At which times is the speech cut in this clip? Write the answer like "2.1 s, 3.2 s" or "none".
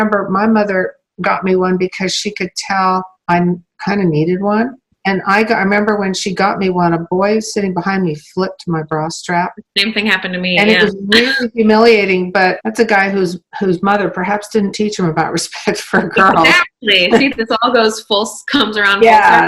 4.9 s, 12.6 s